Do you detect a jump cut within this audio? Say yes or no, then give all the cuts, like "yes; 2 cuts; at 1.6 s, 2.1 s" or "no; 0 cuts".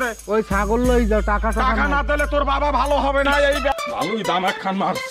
yes; 1 cut; at 3.7 s